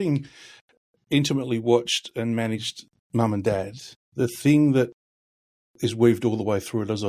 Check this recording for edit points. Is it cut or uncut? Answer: uncut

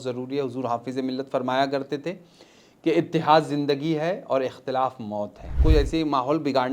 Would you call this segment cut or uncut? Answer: cut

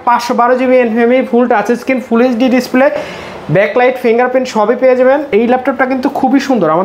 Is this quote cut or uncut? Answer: uncut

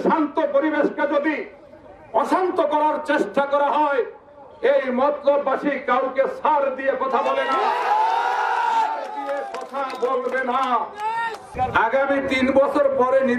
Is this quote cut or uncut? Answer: cut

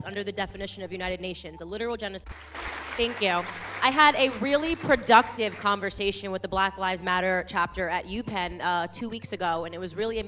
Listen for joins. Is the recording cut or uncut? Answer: cut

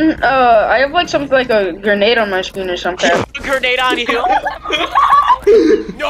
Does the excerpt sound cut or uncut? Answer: uncut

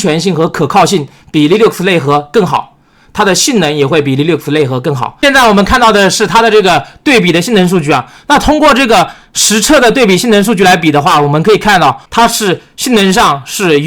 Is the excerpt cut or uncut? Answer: cut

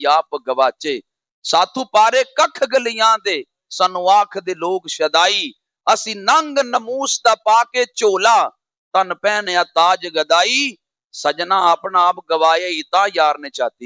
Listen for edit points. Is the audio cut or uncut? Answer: uncut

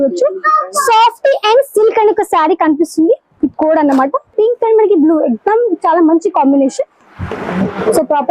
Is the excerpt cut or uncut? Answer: cut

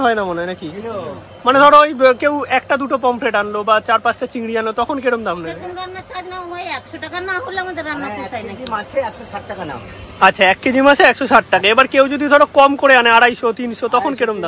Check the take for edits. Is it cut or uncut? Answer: uncut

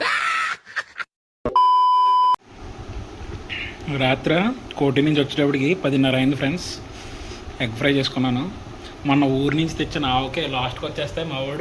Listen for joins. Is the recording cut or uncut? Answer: cut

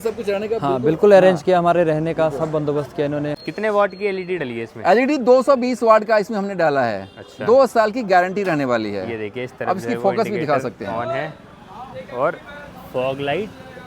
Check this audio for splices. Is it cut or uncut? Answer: cut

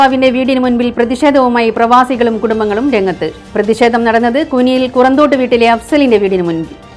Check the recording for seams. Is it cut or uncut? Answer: uncut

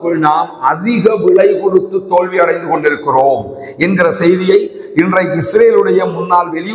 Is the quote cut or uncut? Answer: uncut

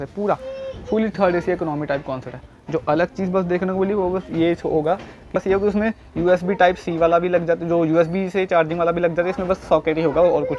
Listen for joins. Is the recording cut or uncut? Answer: uncut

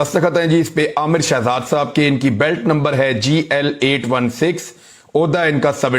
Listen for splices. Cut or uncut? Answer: cut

